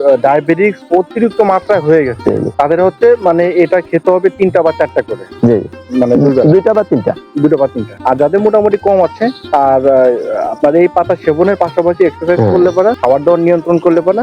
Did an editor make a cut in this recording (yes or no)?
yes